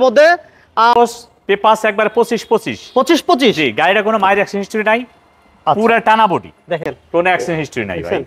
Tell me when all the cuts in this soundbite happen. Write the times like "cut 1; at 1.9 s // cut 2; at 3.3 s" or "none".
cut 1; at 0.9 s // cut 2; at 6.9 s